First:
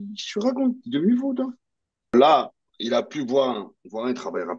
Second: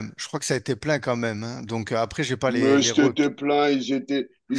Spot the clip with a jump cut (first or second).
first